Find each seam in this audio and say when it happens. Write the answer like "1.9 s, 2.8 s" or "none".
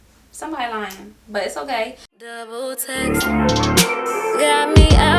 2.1 s